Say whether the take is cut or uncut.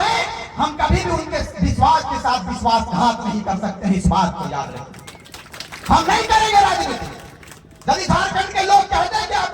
uncut